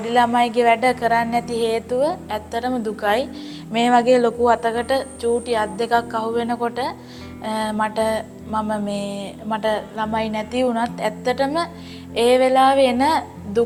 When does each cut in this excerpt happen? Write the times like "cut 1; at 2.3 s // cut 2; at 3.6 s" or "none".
none